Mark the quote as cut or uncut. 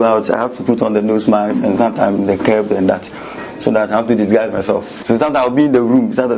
uncut